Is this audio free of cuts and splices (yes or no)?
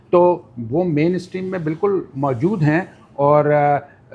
yes